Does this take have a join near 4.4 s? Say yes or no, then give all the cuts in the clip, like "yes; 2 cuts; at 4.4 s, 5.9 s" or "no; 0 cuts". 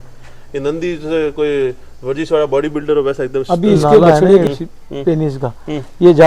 yes; 1 cut; at 4.4 s